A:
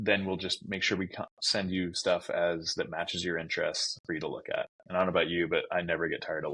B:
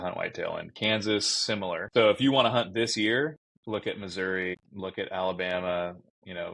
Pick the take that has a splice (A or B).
B